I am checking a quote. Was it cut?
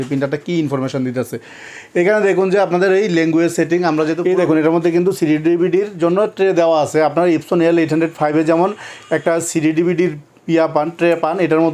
yes; 1 cut; at 4.2 s

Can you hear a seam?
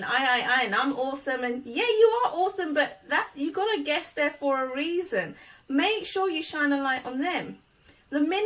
no; 0 cuts

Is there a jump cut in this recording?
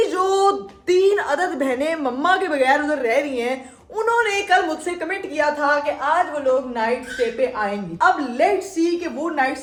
no; 0 cuts

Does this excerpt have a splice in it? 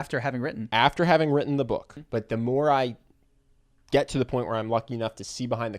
yes; 1 cut; at 2.0 s

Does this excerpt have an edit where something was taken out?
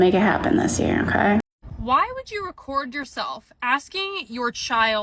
yes; 1 cut; at 1.6 s

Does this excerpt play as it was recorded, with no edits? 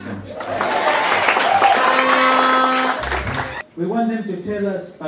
no; 1 cut; at 3.6 s

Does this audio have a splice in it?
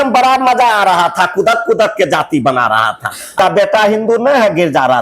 yes; 1 cut; at 3.3 s

